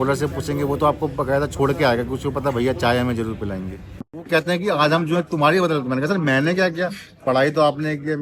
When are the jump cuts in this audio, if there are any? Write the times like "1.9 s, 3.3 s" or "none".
4.3 s